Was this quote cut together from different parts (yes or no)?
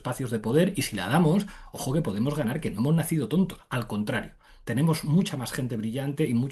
no